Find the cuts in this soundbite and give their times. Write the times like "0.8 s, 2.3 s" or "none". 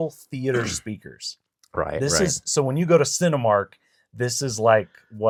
none